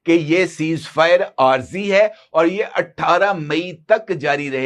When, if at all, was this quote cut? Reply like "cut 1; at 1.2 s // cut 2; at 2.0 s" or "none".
none